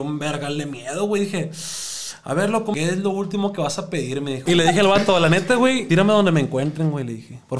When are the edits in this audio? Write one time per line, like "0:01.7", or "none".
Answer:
0:02.7
0:04.4
0:05.8